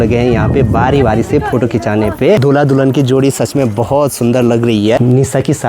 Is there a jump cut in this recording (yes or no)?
yes